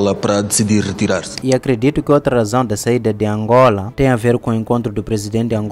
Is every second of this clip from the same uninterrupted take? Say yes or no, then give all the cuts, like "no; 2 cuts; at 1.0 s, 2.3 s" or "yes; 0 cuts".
no; 1 cut; at 1.3 s